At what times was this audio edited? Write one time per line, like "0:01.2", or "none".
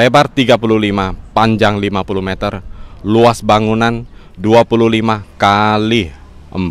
none